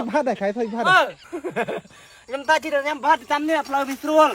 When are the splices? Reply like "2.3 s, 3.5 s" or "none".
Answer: 1.3 s

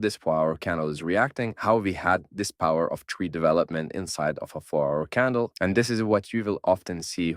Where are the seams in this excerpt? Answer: 5.5 s

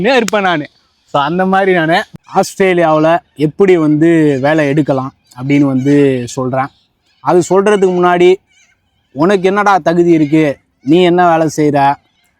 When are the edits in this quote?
2.1 s

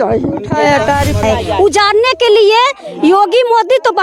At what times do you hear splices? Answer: 1.2 s

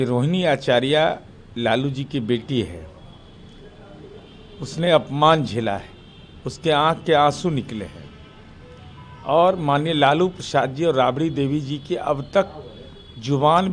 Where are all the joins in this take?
none

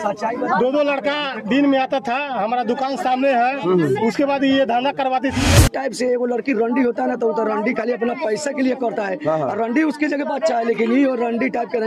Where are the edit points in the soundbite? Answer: 5.5 s

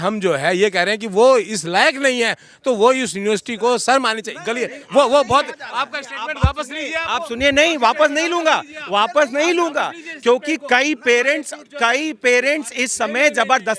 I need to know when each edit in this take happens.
none

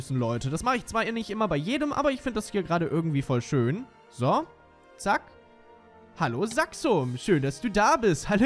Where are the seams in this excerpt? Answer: none

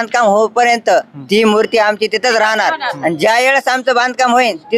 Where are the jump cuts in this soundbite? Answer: none

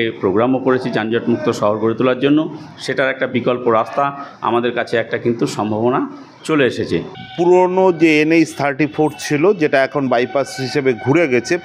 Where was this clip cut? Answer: 7.2 s

